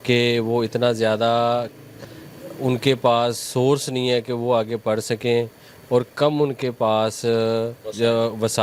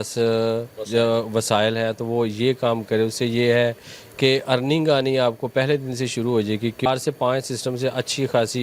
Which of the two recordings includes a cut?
second; 1 cut; at 6.9 s

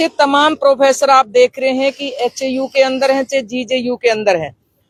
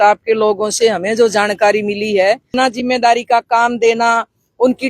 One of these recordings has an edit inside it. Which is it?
second; 1 cut; at 2.5 s

